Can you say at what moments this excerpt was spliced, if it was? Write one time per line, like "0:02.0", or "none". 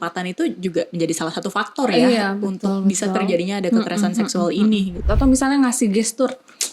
0:05.0